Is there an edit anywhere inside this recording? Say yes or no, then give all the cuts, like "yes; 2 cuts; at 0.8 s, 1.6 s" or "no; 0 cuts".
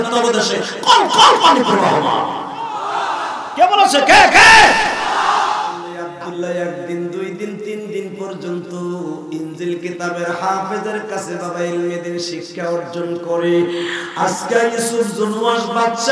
yes; 1 cut; at 6.0 s